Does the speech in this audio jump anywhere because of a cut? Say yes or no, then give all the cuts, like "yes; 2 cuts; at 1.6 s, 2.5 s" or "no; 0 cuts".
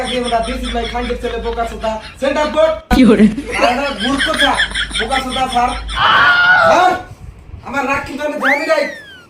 yes; 1 cut; at 5.9 s